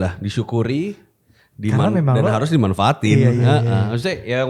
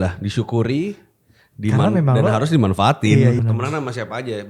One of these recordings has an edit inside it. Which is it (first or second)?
second